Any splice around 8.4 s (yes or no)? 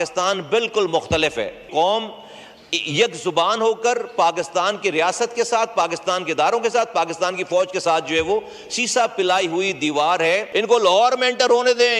no